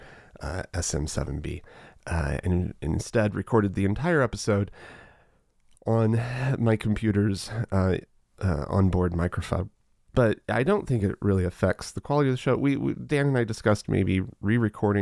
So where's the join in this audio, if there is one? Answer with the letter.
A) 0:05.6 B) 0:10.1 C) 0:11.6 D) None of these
B